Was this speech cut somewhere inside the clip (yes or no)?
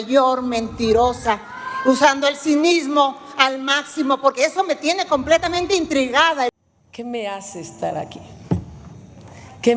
yes